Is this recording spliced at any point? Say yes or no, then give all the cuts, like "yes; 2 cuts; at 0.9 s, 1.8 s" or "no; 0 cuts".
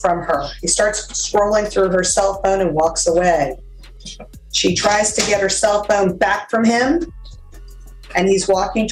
no; 0 cuts